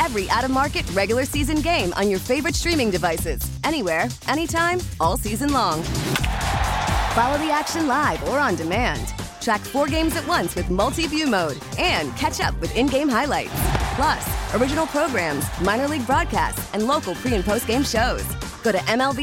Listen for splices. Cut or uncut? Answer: uncut